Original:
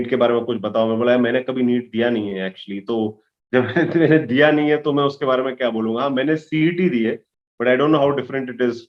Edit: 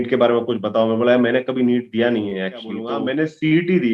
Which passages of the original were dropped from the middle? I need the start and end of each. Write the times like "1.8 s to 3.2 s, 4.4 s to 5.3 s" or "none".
2.8 s to 5.9 s